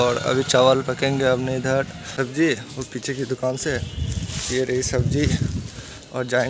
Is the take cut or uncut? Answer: cut